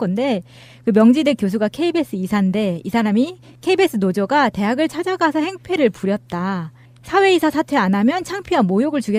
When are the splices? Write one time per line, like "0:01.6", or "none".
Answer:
none